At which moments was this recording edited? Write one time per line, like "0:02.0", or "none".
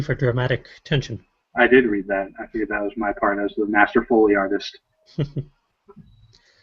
0:01.5